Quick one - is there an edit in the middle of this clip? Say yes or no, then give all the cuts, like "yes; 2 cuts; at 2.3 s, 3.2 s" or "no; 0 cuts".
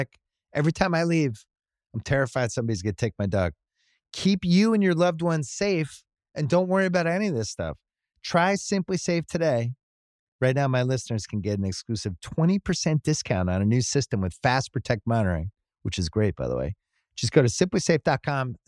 no; 0 cuts